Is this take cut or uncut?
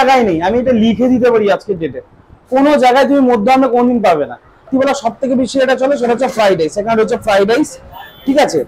cut